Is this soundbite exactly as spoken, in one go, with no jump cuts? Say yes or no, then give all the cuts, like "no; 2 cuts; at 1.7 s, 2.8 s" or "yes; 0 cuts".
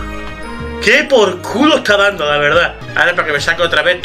no; 1 cut; at 2.8 s